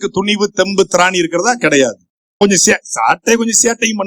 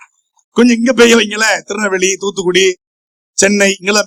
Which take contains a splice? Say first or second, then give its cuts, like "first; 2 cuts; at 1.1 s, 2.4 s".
first; 1 cut; at 2.4 s